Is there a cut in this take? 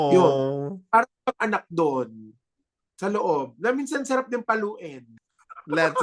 no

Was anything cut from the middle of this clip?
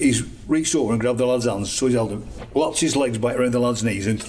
yes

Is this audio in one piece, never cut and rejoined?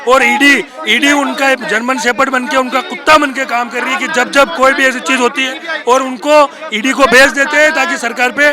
yes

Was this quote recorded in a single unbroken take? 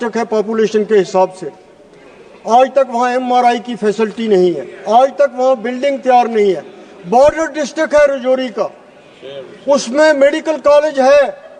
yes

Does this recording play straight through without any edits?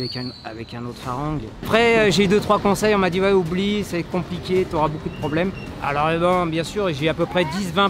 no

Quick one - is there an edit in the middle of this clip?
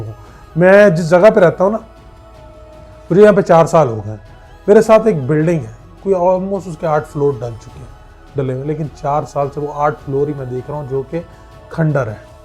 no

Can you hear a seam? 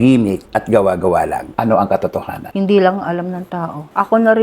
yes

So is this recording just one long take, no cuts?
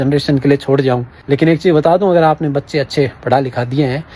no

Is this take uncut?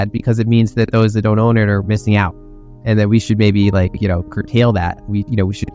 yes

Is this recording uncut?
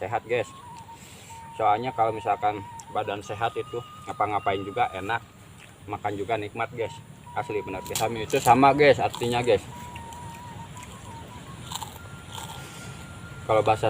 no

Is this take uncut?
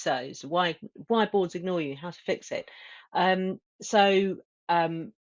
yes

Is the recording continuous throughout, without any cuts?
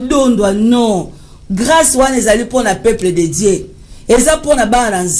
yes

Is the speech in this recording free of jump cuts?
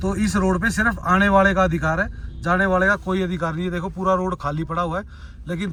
yes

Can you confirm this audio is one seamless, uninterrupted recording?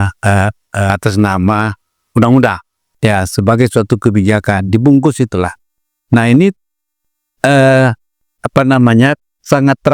no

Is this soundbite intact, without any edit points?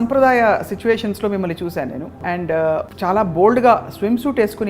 no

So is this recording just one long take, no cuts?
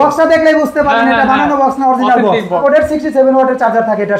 no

